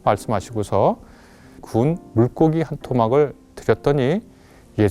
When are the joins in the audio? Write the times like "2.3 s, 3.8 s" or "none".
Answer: 1.6 s